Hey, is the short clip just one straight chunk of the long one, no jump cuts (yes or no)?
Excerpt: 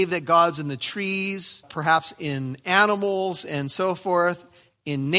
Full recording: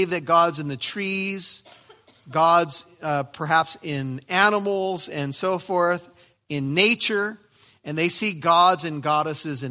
no